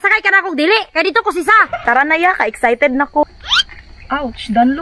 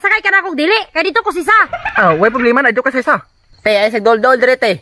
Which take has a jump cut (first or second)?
first